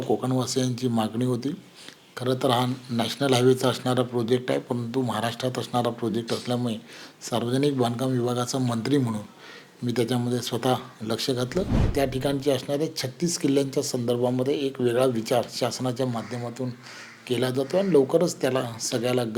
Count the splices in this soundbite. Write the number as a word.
one